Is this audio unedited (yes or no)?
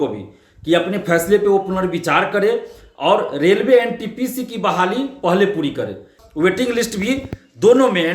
no